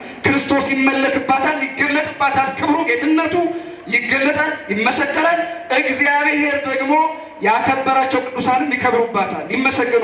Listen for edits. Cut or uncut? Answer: uncut